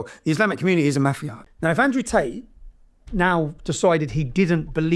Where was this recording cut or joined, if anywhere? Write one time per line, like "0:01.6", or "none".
0:01.3

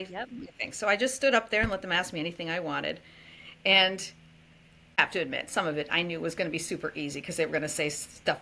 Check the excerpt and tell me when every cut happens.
0:05.0

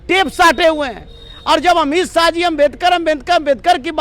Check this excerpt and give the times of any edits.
none

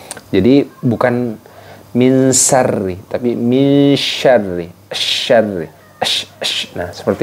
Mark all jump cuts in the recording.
none

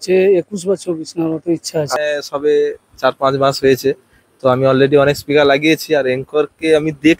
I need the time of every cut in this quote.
0:01.9

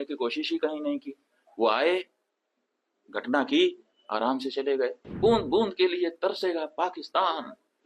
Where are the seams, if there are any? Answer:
0:05.0

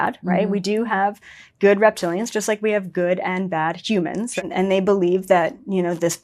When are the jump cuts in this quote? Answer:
0:04.3

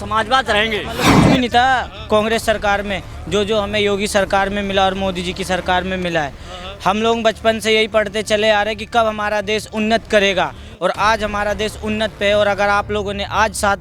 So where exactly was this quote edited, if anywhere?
0:01.0

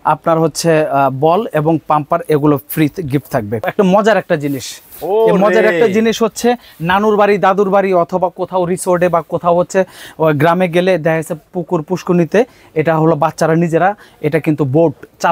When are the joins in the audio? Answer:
0:03.6

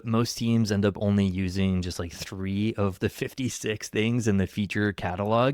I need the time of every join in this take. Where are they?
none

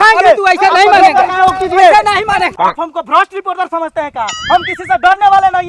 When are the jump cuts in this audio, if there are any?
0:02.5

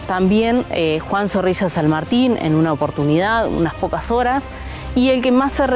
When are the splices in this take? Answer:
none

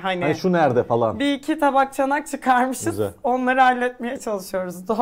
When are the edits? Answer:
none

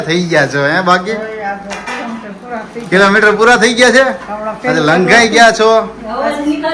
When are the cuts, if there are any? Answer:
none

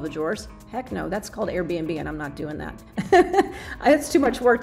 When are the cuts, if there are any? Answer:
none

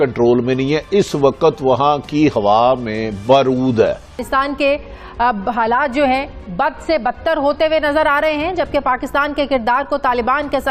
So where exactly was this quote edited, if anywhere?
0:04.2

